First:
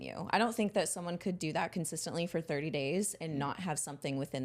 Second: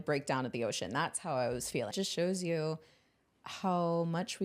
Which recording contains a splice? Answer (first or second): second